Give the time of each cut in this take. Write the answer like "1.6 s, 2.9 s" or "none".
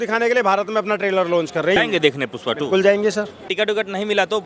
1.8 s, 3.5 s

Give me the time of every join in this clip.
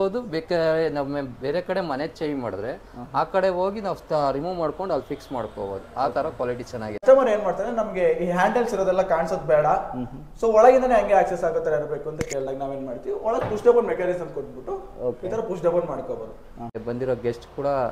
7.0 s, 16.8 s

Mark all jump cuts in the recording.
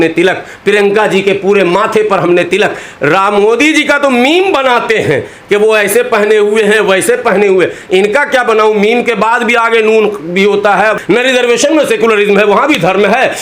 10.9 s

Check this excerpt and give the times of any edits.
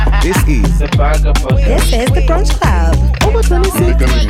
none

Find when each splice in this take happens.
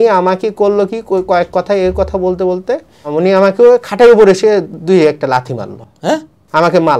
none

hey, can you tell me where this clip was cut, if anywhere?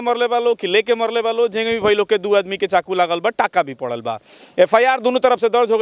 none

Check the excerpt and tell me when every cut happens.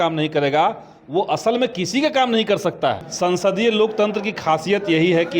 3.1 s

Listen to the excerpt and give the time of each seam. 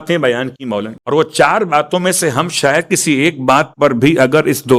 0.9 s

